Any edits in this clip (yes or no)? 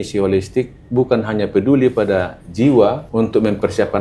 yes